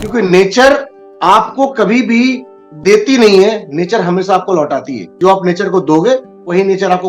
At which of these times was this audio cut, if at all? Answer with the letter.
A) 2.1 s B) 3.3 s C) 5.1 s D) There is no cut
C